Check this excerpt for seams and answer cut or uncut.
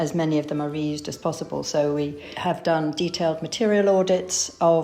cut